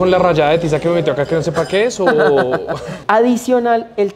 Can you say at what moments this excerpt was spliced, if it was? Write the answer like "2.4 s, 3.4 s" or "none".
2.9 s